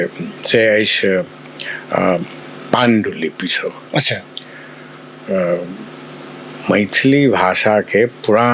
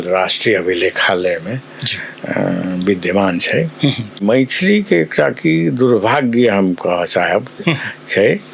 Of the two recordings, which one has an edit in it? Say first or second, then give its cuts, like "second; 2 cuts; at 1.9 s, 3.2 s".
second; 1 cut; at 4.2 s